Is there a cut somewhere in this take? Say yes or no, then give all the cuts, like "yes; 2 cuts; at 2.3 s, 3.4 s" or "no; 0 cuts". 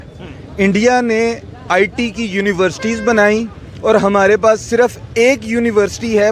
no; 0 cuts